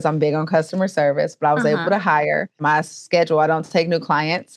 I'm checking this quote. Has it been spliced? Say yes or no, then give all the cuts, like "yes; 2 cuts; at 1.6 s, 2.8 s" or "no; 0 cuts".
yes; 1 cut; at 2.5 s